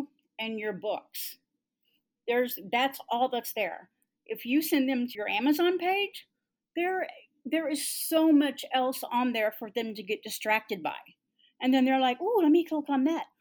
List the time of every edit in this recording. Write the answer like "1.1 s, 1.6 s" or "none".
5.2 s